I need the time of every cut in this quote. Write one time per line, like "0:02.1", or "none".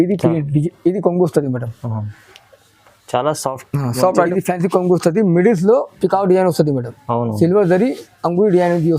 0:04.3